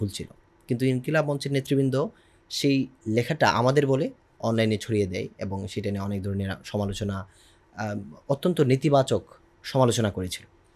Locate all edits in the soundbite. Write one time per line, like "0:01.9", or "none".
none